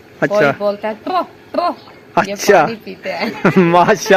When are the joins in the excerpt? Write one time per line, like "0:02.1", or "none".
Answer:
none